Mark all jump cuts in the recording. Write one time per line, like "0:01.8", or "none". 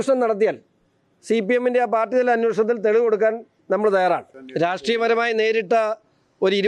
0:04.4